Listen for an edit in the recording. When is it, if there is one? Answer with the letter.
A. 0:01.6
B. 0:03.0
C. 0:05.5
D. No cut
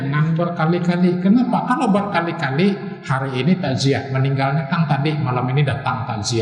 D